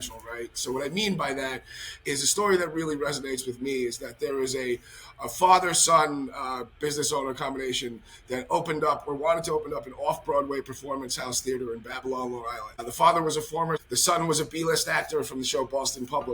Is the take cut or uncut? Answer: cut